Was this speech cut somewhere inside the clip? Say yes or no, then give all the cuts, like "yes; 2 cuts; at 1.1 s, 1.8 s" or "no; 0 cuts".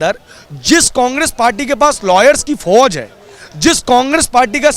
no; 0 cuts